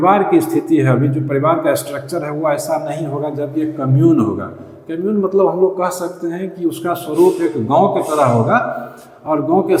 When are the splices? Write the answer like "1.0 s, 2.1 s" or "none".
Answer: none